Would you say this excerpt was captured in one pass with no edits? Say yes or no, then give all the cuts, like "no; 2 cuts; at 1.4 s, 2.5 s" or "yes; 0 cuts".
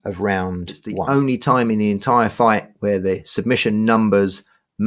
no; 1 cut; at 1.0 s